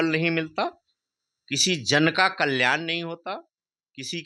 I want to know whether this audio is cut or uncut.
uncut